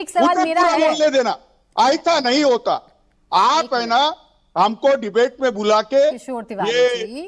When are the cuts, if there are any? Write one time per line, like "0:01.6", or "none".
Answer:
none